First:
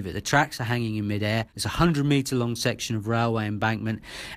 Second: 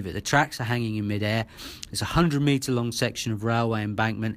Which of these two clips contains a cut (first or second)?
first